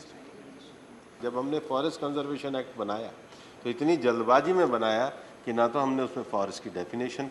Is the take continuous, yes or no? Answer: no